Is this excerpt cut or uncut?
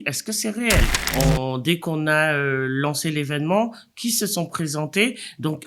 cut